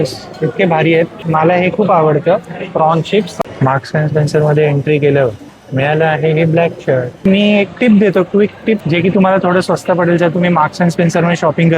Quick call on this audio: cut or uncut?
cut